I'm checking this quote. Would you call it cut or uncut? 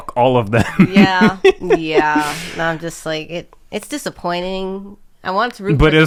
uncut